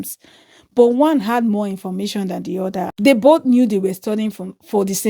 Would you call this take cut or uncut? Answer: cut